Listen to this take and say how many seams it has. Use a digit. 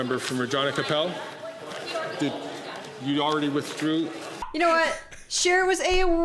1